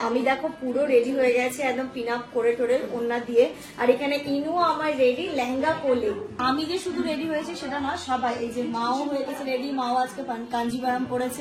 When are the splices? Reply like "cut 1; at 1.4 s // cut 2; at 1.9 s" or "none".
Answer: cut 1; at 6.3 s